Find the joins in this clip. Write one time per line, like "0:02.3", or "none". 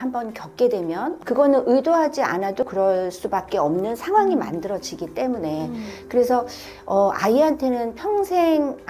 0:01.2

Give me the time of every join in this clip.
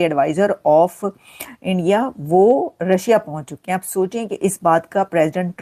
none

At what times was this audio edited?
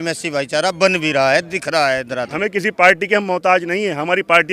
0:02.3

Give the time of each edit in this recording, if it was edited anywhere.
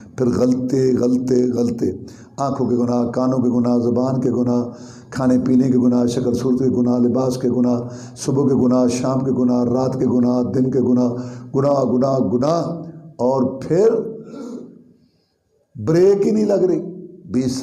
none

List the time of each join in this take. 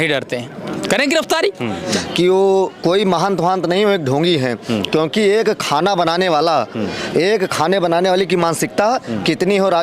0:01.9

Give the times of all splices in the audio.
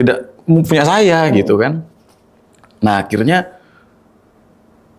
none

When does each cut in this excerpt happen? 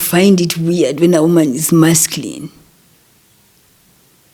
none

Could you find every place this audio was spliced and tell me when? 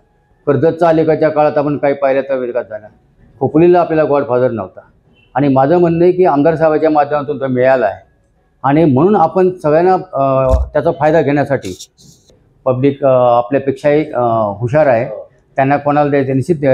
0:12.3

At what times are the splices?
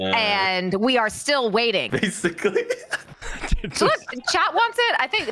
0:01.9

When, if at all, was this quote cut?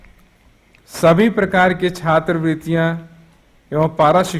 none

